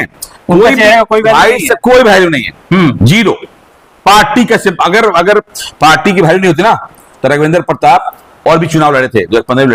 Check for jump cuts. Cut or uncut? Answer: uncut